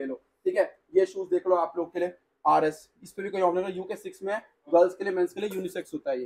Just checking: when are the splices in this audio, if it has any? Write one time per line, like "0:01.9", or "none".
none